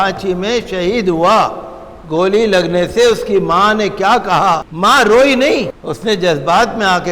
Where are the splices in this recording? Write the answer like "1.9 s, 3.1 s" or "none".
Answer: 4.7 s, 5.8 s